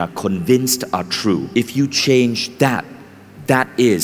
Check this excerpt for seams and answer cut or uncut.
cut